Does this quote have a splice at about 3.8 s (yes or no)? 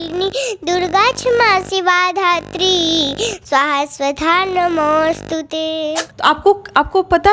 no